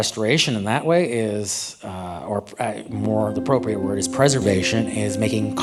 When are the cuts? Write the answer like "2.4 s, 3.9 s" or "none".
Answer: none